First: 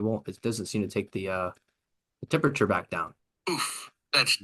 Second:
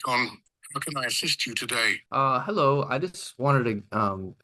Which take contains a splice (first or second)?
second